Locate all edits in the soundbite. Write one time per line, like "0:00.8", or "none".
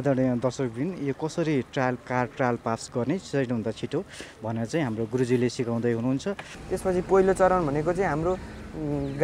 0:06.5